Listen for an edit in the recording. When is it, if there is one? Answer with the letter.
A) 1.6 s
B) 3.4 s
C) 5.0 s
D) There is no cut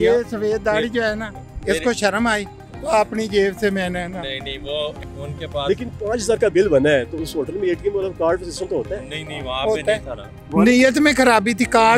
C